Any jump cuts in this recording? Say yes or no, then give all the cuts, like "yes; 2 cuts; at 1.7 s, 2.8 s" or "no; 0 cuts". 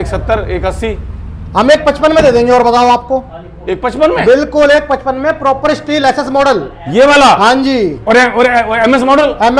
no; 0 cuts